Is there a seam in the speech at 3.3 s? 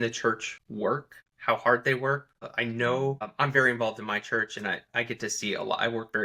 yes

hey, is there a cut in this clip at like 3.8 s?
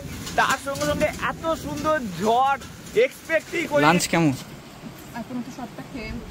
yes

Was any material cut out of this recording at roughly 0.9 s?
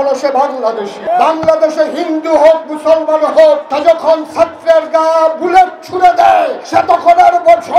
yes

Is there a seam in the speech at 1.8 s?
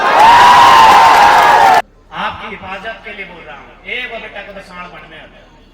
yes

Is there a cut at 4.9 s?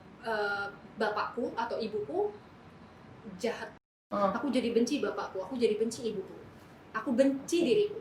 no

